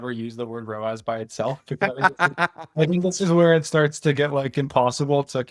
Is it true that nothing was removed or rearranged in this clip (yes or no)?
yes